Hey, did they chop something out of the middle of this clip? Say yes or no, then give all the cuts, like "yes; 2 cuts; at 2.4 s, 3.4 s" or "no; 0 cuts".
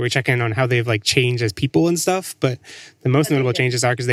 no; 0 cuts